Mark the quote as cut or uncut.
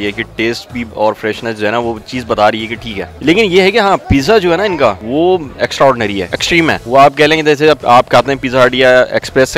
uncut